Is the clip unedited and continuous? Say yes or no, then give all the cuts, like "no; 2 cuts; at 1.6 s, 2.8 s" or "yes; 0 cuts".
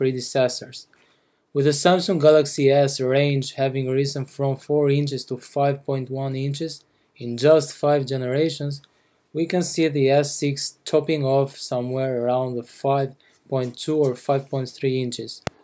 yes; 0 cuts